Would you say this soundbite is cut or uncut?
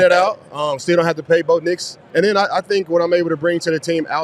cut